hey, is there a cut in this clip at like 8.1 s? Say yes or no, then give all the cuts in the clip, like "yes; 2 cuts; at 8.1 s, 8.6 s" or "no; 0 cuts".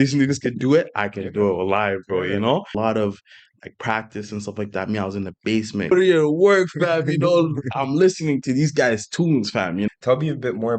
no; 3 cuts; at 2.8 s, 5.9 s, 9.9 s